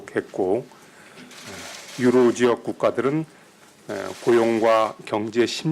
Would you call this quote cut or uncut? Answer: cut